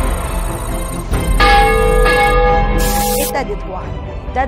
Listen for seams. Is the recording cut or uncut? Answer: cut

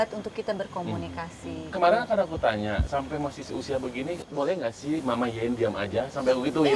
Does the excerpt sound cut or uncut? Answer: cut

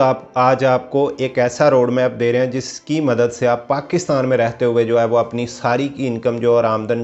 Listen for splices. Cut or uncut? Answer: uncut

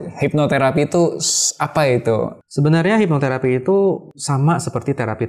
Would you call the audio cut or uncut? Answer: cut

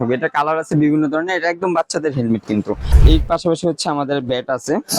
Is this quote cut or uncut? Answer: cut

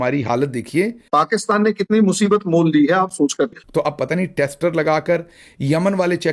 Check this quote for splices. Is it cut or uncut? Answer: cut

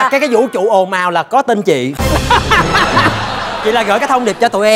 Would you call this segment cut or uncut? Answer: uncut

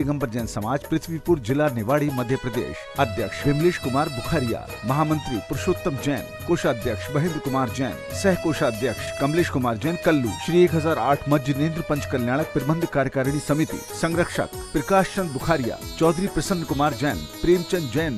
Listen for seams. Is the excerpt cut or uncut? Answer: uncut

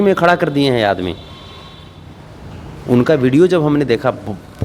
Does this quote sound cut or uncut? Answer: uncut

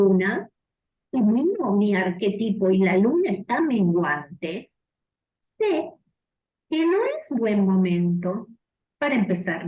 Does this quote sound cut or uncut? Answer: uncut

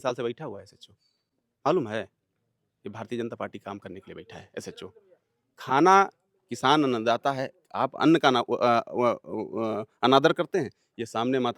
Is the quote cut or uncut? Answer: uncut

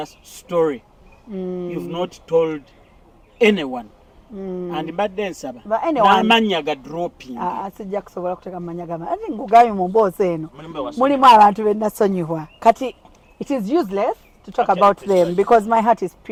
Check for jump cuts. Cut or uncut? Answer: uncut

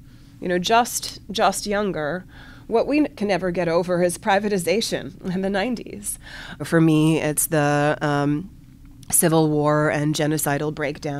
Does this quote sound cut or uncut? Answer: cut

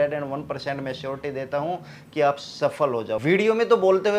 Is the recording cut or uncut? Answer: cut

